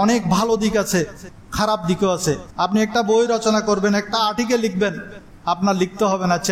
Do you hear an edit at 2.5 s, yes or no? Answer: yes